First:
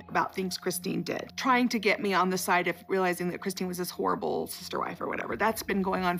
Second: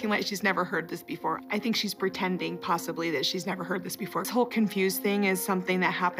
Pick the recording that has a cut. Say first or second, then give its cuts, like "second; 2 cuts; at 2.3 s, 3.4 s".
second; 1 cut; at 4.3 s